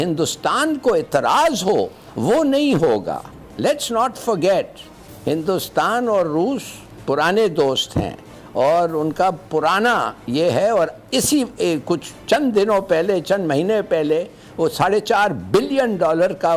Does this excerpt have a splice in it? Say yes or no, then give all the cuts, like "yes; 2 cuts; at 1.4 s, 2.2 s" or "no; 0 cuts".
no; 0 cuts